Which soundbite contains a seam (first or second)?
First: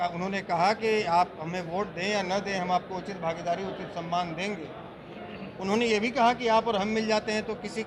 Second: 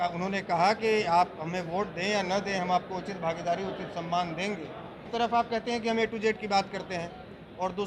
second